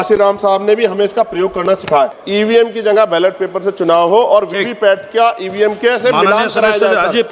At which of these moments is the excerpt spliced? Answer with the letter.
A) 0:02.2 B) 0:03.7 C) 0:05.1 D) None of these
A